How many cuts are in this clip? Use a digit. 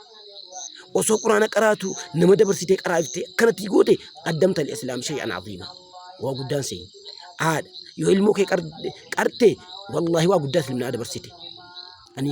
1